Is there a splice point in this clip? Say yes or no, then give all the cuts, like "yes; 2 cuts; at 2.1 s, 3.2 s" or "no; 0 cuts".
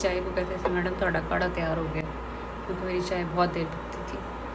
no; 0 cuts